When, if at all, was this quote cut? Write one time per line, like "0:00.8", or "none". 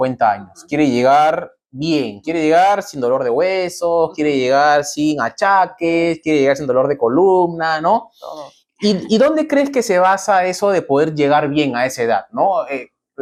none